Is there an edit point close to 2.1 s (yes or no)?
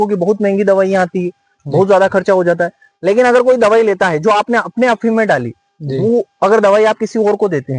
no